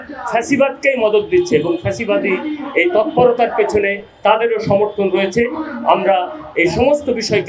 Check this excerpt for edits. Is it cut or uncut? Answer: uncut